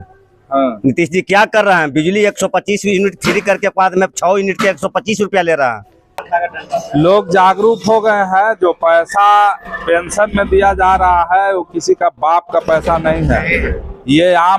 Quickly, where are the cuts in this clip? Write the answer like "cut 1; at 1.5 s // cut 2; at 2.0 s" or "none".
cut 1; at 6.2 s